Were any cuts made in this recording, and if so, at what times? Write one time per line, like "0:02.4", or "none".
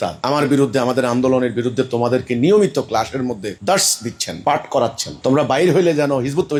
none